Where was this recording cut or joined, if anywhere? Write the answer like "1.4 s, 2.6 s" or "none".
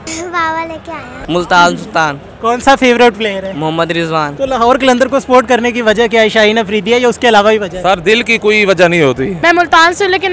1.1 s, 4.3 s, 9.4 s